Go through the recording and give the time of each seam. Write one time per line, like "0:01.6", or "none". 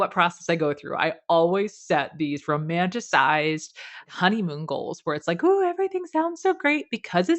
0:04.1